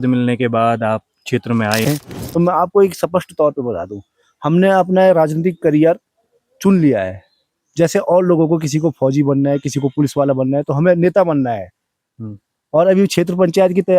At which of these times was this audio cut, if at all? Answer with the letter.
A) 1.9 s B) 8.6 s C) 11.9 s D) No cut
A